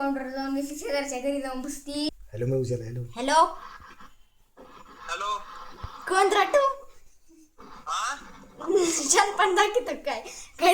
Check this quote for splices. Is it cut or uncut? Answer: cut